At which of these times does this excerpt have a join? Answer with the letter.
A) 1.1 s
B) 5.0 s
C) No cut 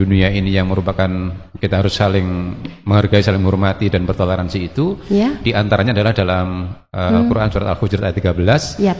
C